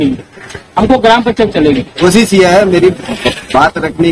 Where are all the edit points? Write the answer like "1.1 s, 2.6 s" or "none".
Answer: 1.9 s